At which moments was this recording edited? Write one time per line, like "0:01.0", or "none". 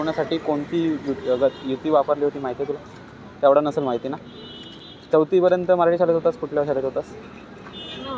none